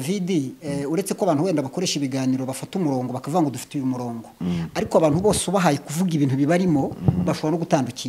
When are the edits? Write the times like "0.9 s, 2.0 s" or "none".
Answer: none